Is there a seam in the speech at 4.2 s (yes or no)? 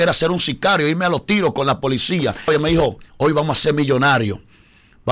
no